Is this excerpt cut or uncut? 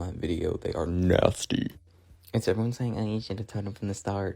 uncut